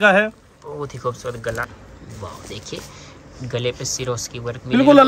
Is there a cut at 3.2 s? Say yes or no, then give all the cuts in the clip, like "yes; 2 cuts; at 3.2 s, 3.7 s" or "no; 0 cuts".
no; 1 cut; at 1.7 s